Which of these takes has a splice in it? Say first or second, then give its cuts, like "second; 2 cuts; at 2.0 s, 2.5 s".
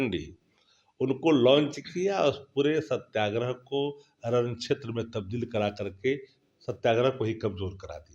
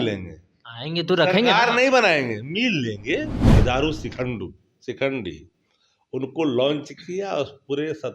second; 1 cut; at 3.6 s